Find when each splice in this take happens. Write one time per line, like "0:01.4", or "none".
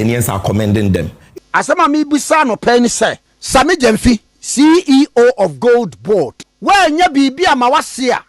0:01.2
0:03.3
0:06.4